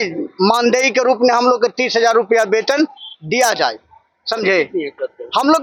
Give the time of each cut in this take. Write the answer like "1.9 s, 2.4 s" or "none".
none